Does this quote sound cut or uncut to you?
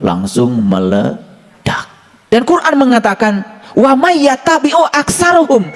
cut